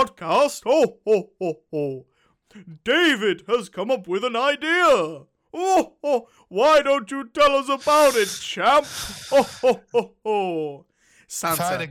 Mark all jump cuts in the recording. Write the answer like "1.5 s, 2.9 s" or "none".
none